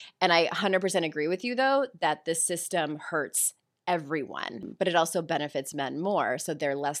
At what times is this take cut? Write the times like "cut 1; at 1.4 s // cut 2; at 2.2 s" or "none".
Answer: cut 1; at 4.7 s

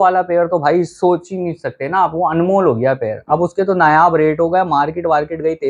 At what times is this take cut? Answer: none

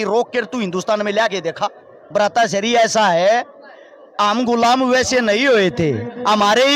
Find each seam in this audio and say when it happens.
cut 1; at 2.0 s

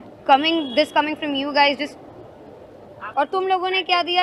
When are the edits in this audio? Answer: cut 1; at 3.1 s

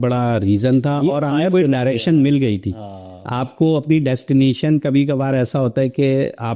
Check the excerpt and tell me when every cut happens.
none

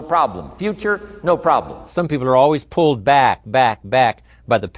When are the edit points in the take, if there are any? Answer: cut 1; at 1.9 s

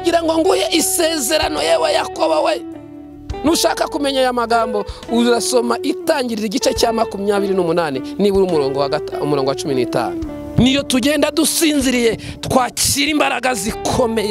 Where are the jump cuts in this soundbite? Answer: cut 1; at 10.5 s

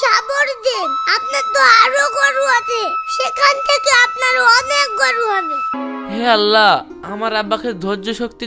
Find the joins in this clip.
cut 1; at 5.7 s

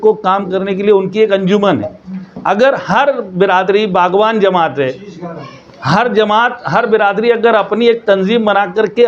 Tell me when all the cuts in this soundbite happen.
none

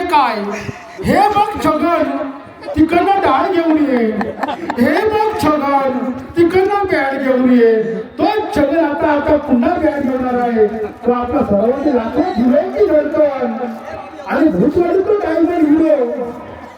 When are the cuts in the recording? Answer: none

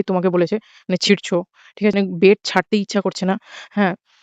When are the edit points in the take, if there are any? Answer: cut 1; at 1.9 s

